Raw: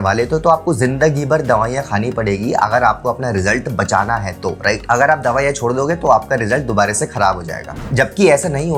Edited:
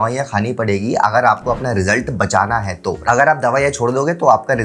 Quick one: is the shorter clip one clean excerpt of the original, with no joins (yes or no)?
no